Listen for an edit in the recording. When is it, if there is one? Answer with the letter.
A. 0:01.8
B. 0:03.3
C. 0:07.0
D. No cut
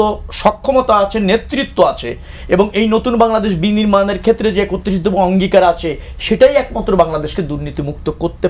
D